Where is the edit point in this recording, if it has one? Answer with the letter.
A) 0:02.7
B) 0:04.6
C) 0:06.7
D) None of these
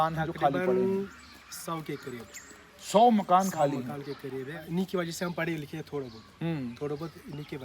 B